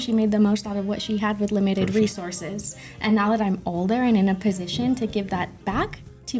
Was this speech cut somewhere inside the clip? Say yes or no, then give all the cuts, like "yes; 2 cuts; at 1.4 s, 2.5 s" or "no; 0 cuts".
no; 0 cuts